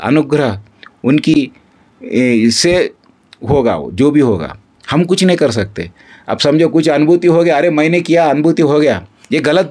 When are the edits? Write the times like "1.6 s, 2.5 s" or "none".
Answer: none